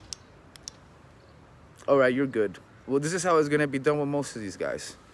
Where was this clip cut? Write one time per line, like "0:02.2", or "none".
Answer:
none